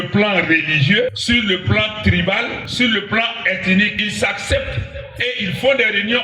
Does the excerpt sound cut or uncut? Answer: cut